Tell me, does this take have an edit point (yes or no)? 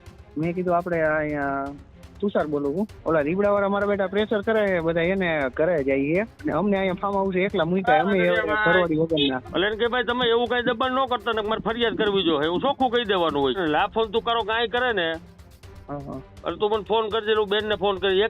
yes